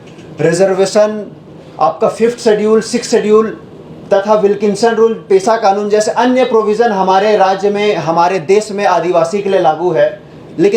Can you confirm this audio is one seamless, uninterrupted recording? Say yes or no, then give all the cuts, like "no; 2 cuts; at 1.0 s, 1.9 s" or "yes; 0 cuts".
yes; 0 cuts